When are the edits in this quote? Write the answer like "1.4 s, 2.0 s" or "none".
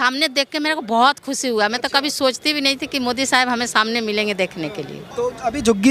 5.0 s

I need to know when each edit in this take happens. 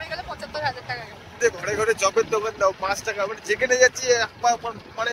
1.4 s

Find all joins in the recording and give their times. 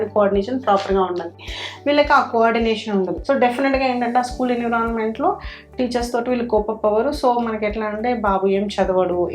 3.2 s

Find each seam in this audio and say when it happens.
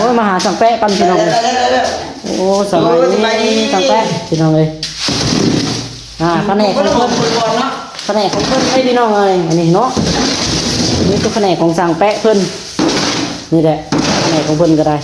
none

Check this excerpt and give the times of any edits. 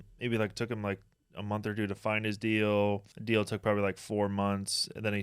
3.1 s

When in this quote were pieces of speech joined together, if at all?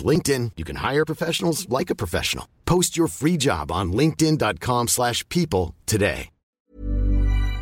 6.6 s

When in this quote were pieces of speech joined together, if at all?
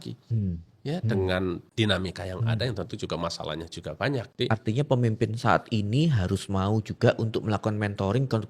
1.7 s, 4.3 s

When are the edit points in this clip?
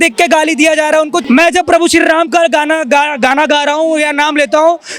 1.2 s

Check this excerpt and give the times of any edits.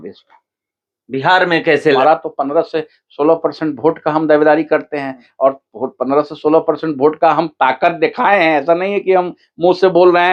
2.0 s

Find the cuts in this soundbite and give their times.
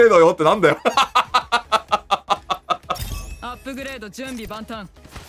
none

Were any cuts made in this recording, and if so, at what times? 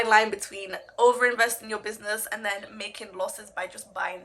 none

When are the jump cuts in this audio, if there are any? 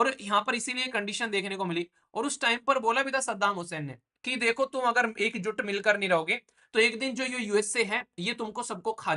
none

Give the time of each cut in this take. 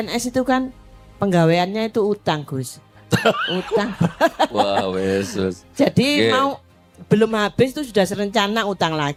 none

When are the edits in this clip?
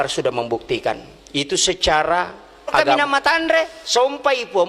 3.0 s

